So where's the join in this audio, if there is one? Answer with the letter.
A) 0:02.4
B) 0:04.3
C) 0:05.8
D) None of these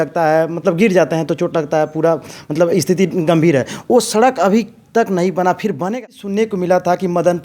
C